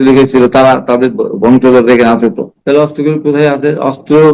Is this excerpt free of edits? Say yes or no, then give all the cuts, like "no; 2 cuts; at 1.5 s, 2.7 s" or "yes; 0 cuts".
no; 1 cut; at 2.5 s